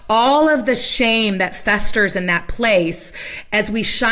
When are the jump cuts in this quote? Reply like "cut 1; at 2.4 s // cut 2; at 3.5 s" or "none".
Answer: none